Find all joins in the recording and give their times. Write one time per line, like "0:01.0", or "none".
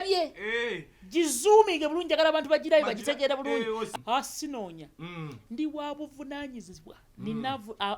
0:03.8